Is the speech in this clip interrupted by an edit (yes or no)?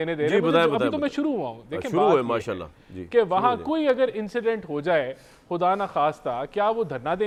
no